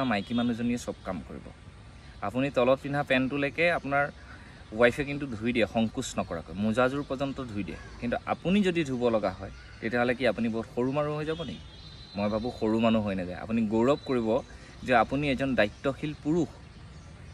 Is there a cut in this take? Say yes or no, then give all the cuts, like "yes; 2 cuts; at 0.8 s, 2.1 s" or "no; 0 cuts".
no; 0 cuts